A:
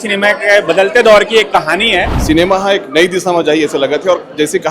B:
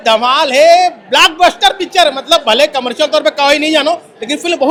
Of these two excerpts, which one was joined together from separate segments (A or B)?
A